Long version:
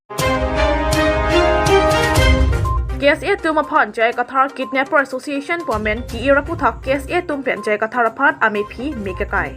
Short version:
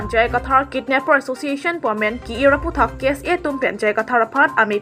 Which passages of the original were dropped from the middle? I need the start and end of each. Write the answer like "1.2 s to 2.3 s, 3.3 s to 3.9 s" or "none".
none

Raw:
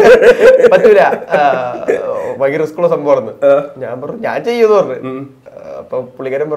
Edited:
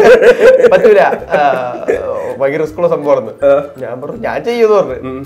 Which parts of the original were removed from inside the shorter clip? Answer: none

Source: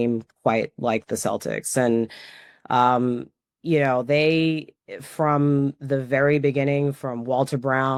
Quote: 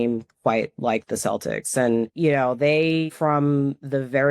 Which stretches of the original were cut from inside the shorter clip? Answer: 2.1 s to 3.6 s, 4.6 s to 5.1 s

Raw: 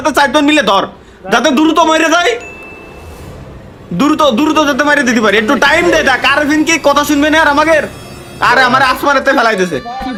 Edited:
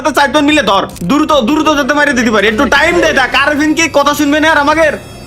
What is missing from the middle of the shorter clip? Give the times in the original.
0.9 s to 3.8 s

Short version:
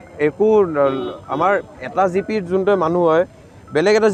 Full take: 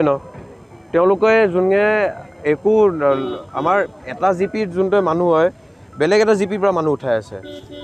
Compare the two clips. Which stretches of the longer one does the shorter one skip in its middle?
none

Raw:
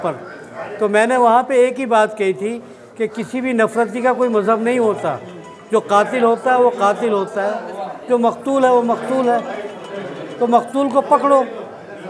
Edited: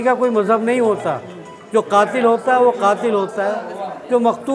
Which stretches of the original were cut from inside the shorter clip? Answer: none

